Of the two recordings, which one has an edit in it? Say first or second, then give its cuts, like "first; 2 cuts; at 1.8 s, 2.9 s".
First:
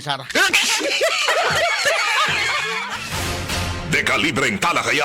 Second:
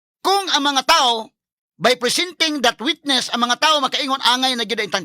first; 1 cut; at 2.9 s